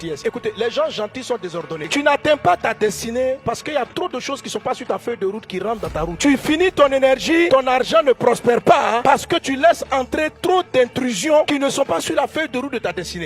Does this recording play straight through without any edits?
no; 2 cuts; at 1.9 s, 7.5 s

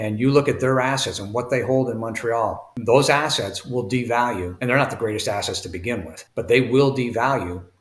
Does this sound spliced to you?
yes; 1 cut; at 6.2 s

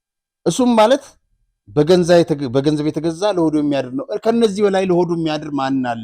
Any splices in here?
no; 0 cuts

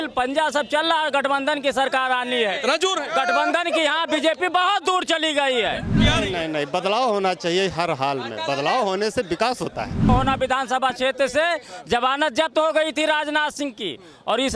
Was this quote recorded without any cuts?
no; 2 cuts; at 5.9 s, 10.1 s

